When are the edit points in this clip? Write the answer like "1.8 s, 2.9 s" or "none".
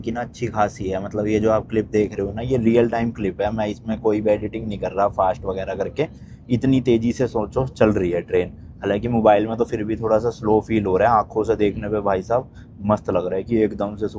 none